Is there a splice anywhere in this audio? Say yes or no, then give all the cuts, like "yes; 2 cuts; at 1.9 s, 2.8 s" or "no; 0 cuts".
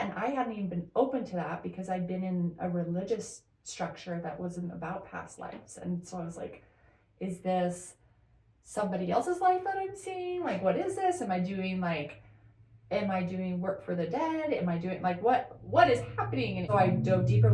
yes; 1 cut; at 16.6 s